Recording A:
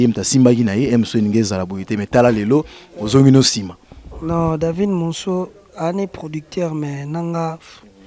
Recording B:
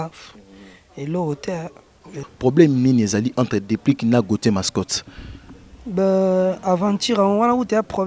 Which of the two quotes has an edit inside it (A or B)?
B